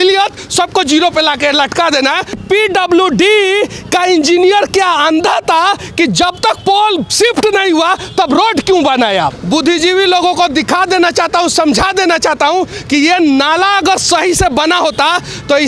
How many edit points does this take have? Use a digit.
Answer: 2